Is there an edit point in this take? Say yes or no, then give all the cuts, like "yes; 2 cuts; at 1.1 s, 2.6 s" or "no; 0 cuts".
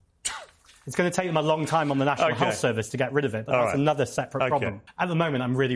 yes; 1 cut; at 4.8 s